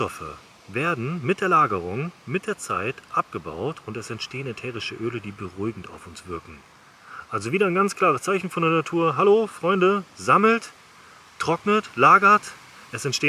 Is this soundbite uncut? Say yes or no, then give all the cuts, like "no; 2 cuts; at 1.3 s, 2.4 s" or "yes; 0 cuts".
yes; 0 cuts